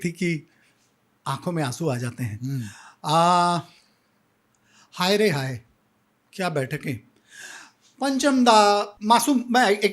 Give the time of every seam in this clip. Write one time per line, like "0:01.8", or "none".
none